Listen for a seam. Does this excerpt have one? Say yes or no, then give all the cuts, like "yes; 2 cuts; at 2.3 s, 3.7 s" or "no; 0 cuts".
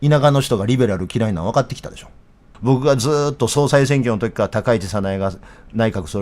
yes; 1 cut; at 2.4 s